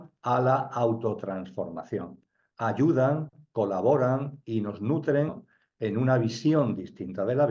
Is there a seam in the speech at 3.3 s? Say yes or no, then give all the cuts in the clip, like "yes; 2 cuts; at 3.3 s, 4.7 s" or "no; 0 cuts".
no; 1 cut; at 5.5 s